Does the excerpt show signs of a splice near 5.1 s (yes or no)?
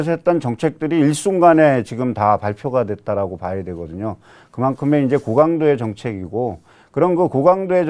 no